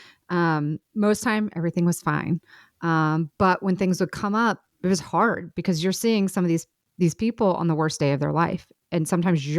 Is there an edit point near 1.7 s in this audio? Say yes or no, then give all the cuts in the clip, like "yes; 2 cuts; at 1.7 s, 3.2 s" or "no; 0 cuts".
no; 1 cut; at 4.7 s